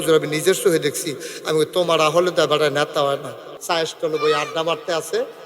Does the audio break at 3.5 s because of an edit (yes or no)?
yes